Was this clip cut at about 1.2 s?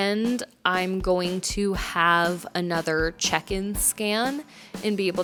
no; 0 cuts

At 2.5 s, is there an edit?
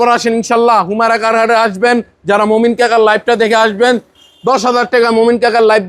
no; 0 cuts

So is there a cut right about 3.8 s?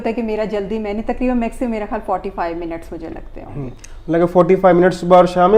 no; 0 cuts

